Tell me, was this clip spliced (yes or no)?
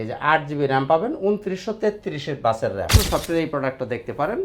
yes